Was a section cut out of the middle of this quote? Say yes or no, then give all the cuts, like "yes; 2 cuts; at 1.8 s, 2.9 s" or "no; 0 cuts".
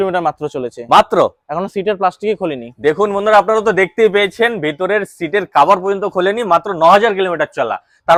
no; 0 cuts